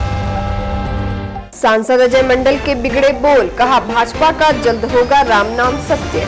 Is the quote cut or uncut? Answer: cut